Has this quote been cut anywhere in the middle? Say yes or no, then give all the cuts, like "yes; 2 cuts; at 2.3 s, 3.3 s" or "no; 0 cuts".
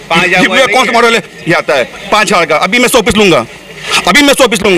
no; 0 cuts